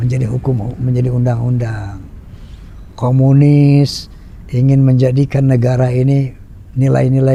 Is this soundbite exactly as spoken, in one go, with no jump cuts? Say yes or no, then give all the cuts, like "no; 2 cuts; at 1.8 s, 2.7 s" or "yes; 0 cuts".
yes; 0 cuts